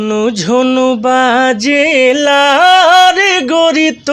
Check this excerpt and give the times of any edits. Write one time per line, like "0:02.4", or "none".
none